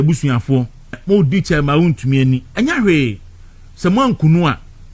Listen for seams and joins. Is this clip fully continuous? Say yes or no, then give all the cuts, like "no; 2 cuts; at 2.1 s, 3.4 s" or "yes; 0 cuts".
no; 1 cut; at 1.0 s